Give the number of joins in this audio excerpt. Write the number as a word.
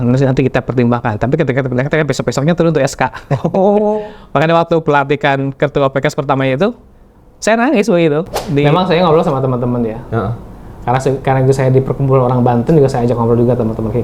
one